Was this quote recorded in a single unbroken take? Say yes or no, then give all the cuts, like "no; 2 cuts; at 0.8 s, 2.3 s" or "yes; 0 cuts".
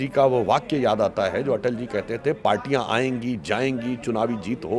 yes; 0 cuts